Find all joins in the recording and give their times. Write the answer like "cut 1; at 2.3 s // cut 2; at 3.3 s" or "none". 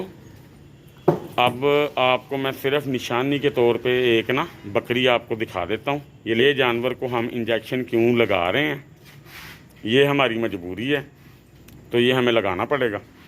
cut 1; at 6.4 s